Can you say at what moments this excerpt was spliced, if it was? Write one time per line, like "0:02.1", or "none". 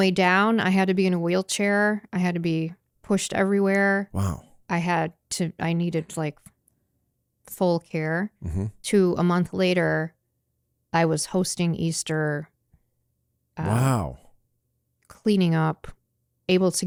none